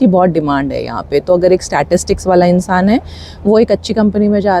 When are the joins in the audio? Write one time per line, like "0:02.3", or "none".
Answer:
none